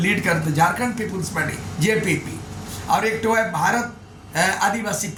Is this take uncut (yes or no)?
yes